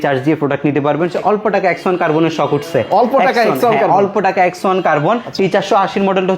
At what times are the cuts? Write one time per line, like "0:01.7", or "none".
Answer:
0:01.1
0:05.3